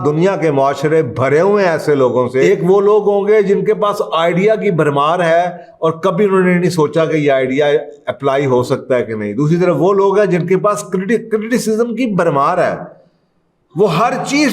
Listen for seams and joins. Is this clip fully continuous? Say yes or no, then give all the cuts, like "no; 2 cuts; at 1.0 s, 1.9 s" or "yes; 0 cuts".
no; 1 cut; at 2.4 s